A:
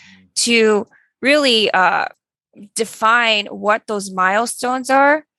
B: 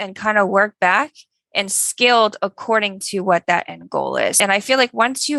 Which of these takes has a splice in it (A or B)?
B